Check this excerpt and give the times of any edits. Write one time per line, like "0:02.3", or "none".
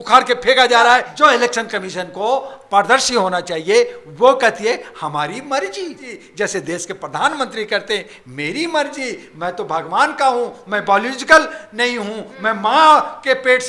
0:01.1
0:06.2